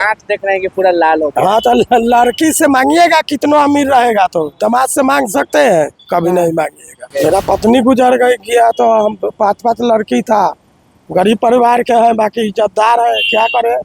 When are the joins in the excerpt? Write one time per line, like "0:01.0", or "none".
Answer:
0:07.1